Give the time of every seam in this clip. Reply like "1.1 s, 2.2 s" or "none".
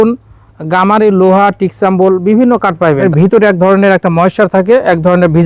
3.0 s

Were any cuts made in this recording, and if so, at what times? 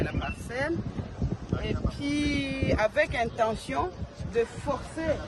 none

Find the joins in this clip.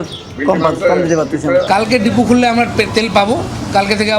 1.7 s

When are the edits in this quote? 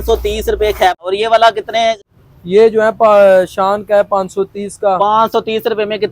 1.0 s, 2.1 s

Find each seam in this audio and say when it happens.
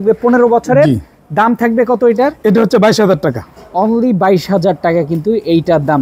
none

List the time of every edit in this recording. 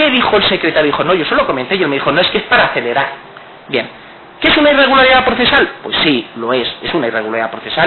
none

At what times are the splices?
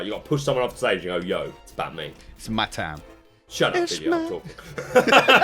1.6 s

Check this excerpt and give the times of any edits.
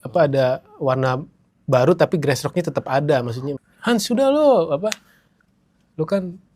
3.4 s

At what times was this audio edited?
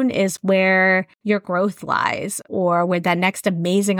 1.1 s

